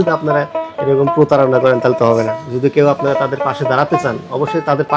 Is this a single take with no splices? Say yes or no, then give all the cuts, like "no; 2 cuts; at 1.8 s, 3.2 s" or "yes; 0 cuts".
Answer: yes; 0 cuts